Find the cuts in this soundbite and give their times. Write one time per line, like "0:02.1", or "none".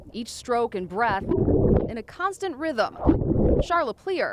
none